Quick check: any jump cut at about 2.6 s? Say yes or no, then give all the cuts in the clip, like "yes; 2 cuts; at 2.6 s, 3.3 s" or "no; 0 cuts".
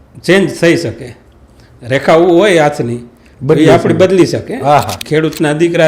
no; 1 cut; at 5.0 s